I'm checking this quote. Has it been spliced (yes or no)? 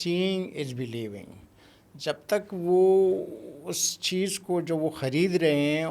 no